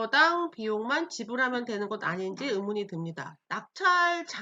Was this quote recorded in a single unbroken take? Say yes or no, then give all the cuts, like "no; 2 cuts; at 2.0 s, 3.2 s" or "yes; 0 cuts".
no; 1 cut; at 3.3 s